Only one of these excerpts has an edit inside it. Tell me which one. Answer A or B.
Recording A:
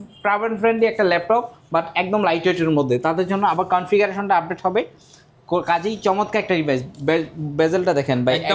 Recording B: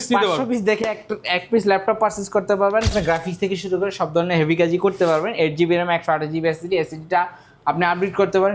B